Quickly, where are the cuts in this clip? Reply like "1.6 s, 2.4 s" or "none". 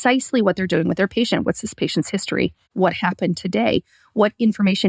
1.4 s, 2.7 s